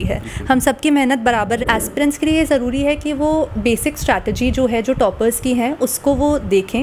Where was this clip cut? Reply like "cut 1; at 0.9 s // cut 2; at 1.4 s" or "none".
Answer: cut 1; at 1.6 s

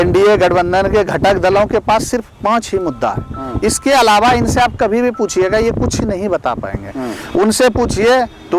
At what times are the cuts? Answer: none

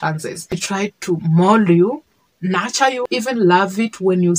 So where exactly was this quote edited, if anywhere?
cut 1; at 3.1 s

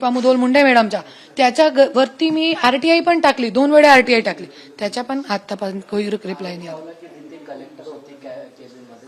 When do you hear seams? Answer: none

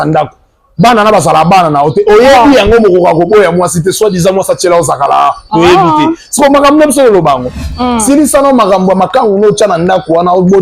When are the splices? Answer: cut 1; at 7.7 s

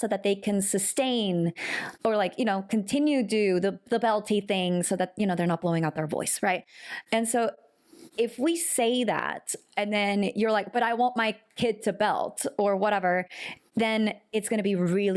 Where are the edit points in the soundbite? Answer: none

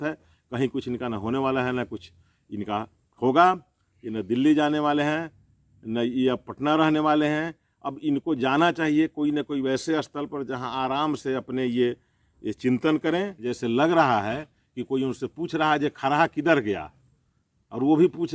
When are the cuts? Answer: cut 1; at 13.4 s

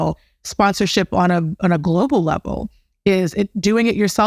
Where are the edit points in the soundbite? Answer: none

